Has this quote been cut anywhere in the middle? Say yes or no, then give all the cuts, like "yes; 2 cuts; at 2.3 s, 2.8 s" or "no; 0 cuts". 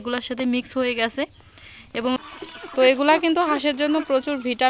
yes; 1 cut; at 2.2 s